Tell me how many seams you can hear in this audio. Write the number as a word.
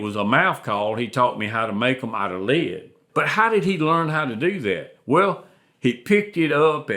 one